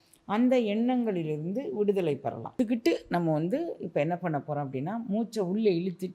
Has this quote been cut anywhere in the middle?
yes; 1 cut; at 2.5 s

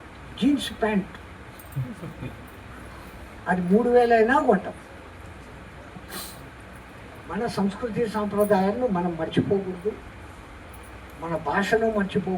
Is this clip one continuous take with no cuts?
yes; 0 cuts

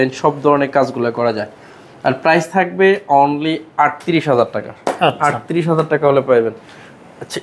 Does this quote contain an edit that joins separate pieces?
no; 0 cuts

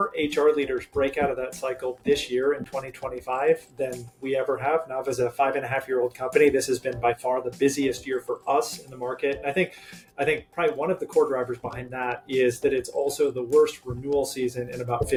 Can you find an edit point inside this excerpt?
no; 0 cuts

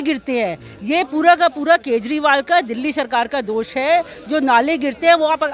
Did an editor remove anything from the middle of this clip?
no; 0 cuts

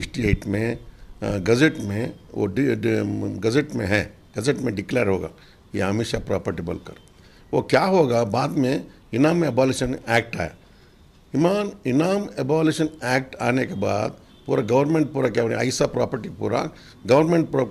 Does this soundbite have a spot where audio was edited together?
no; 0 cuts

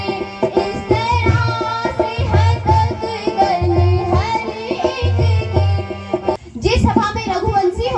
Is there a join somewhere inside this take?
yes; 1 cut; at 6.4 s

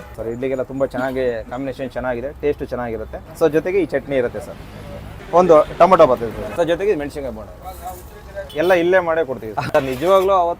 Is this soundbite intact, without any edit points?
no; 1 cut; at 9.6 s

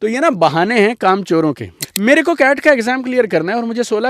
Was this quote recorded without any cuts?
no; 1 cut; at 1.8 s

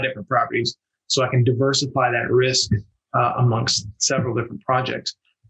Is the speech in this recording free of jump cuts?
yes; 0 cuts

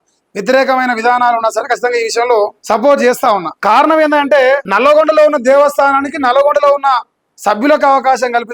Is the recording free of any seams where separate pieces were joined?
no; 3 cuts; at 2.6 s, 3.5 s, 4.7 s

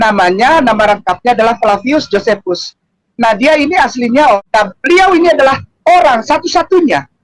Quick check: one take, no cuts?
no; 1 cut; at 4.4 s

